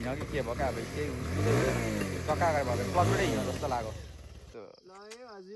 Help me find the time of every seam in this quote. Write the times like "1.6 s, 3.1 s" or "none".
4.6 s